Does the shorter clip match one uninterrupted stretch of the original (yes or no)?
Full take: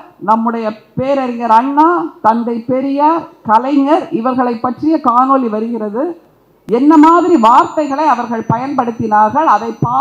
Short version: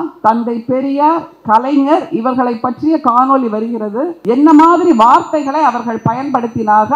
no